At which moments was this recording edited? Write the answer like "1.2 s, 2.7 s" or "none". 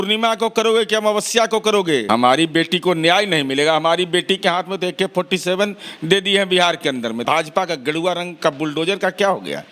2.1 s, 7.2 s